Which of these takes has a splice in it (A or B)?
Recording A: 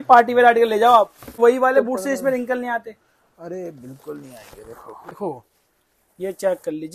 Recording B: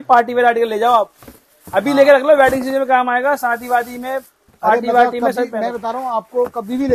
A